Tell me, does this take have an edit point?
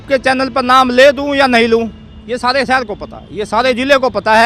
no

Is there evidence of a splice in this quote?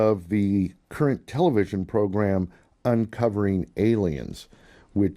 yes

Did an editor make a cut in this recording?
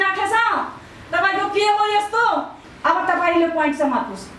yes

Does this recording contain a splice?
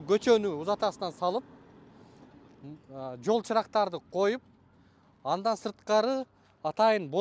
no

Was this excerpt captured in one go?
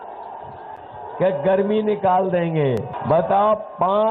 no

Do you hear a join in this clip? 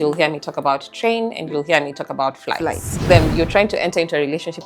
yes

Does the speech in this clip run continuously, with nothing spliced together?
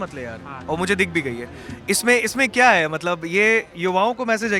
yes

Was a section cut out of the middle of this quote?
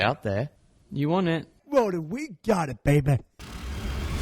yes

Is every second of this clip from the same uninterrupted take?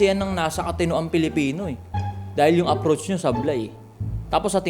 yes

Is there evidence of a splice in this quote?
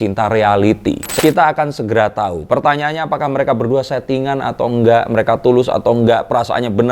yes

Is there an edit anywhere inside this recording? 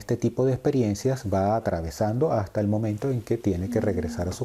no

